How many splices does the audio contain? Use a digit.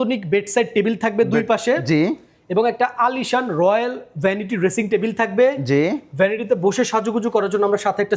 0